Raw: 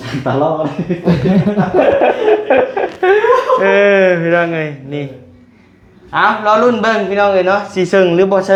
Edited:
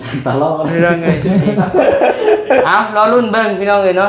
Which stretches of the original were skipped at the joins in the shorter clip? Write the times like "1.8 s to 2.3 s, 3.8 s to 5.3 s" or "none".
2.7 s to 6.2 s